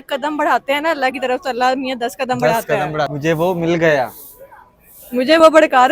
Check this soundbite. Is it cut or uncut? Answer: cut